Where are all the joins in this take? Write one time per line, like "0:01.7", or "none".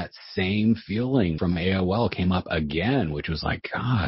0:01.4